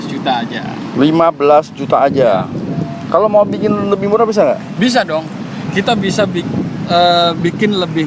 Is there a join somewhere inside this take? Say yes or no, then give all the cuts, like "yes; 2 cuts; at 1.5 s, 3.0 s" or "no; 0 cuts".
no; 0 cuts